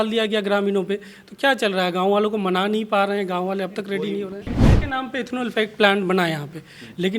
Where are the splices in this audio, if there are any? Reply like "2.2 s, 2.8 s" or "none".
4.5 s